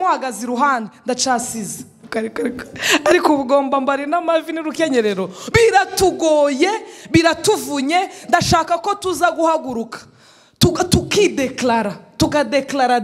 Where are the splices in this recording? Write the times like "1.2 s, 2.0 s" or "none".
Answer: 2.0 s